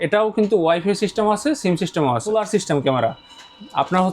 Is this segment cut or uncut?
cut